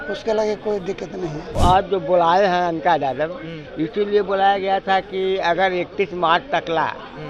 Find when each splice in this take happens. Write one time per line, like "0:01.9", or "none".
0:01.6